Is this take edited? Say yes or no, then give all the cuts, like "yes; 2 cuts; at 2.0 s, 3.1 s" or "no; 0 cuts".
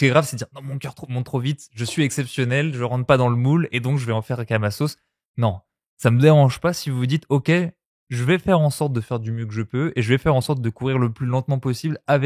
no; 0 cuts